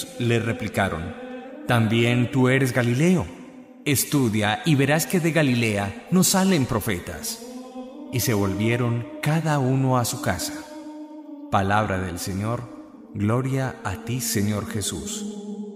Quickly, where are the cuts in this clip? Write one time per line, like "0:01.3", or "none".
0:09.7